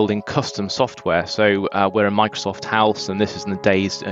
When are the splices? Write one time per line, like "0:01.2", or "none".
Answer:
none